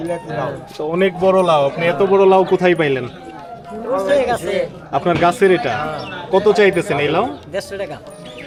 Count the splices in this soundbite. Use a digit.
0